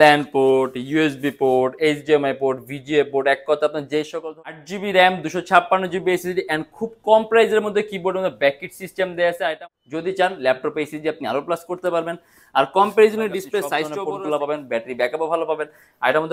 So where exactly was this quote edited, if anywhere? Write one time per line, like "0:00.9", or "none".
0:04.6
0:09.5
0:13.8